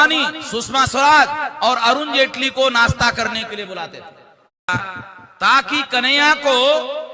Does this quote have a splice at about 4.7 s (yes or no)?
yes